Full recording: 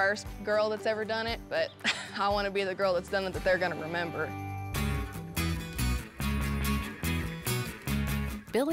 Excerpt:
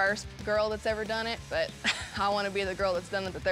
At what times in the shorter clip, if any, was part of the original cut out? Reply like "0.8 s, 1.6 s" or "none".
none